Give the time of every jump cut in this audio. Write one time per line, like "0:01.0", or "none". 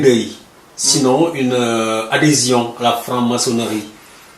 0:02.7